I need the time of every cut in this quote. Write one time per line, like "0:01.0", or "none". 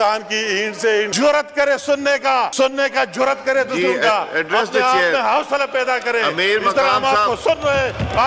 0:01.1
0:02.5